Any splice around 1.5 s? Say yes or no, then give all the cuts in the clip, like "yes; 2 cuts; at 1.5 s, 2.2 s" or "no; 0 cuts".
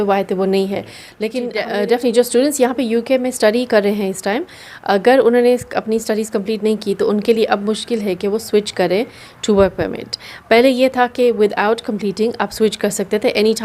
yes; 1 cut; at 1.5 s